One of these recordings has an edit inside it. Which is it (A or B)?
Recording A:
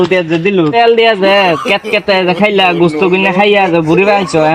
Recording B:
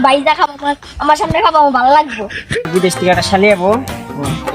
B